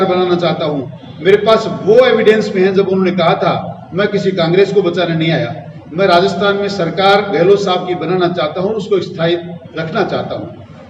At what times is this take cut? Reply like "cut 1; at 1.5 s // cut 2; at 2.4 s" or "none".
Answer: none